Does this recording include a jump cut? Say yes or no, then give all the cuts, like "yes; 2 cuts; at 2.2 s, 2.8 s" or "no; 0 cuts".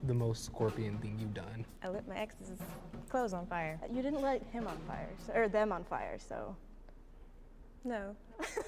yes; 2 cuts; at 1.6 s, 3.8 s